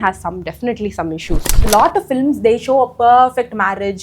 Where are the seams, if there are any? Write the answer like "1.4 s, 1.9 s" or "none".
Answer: 1.6 s